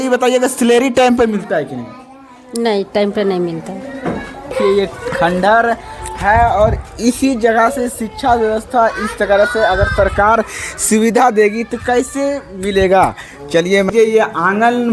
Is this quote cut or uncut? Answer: cut